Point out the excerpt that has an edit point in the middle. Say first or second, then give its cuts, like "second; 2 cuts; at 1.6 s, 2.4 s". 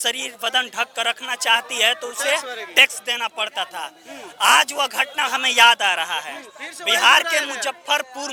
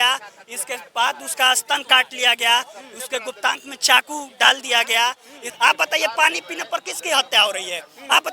second; 1 cut; at 5.5 s